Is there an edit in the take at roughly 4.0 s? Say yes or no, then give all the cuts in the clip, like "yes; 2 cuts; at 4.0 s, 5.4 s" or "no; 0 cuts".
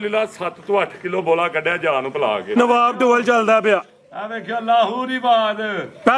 no; 1 cut; at 2.6 s